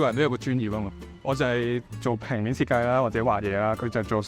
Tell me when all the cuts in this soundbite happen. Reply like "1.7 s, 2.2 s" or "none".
1.9 s